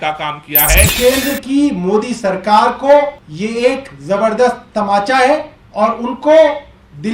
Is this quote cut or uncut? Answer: cut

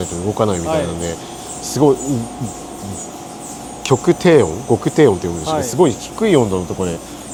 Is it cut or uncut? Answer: uncut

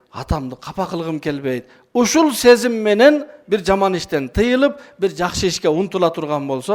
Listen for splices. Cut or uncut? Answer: uncut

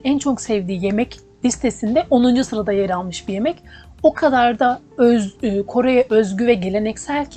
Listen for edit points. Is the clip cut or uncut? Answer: uncut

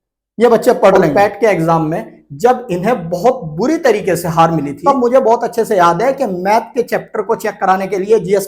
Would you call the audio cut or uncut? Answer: cut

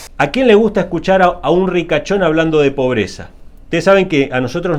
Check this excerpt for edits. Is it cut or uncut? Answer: uncut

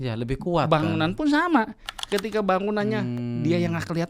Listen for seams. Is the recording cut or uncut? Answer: uncut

